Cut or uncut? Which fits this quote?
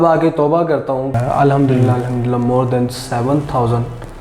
cut